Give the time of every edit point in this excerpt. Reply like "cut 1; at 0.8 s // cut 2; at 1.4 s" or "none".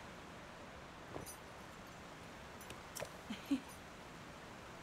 none